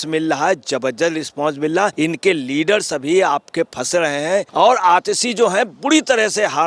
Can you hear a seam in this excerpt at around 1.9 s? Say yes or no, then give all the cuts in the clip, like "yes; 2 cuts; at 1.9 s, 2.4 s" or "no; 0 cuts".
yes; 2 cuts; at 1.9 s, 4.5 s